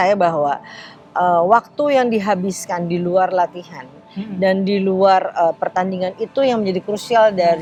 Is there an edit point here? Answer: no; 0 cuts

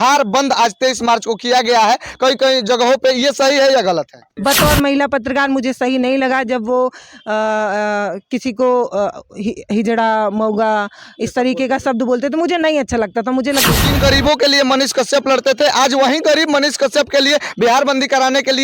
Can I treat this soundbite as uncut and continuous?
no; 2 cuts; at 4.6 s, 13.6 s

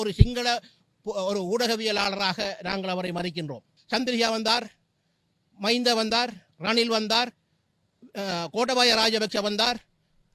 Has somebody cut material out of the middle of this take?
yes; 1 cut; at 3.7 s

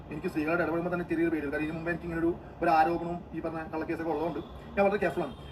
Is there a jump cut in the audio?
no; 0 cuts

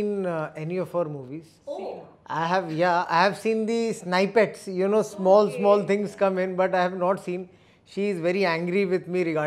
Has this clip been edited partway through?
no; 0 cuts

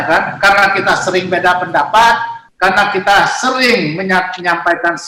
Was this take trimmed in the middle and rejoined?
no; 0 cuts

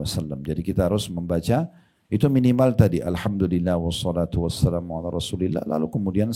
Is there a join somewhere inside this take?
no; 0 cuts

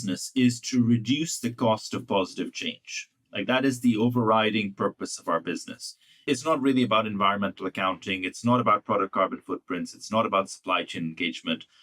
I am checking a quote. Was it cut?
yes; 1 cut; at 6.2 s

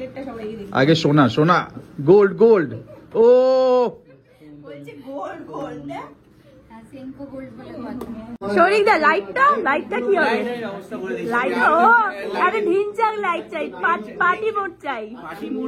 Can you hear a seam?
yes; 1 cut; at 8.4 s

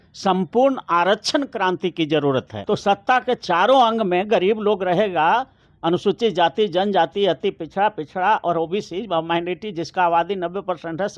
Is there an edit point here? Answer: yes; 1 cut; at 2.6 s

